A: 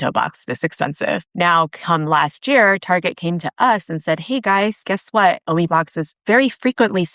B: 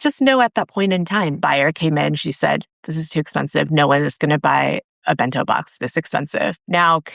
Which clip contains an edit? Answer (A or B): B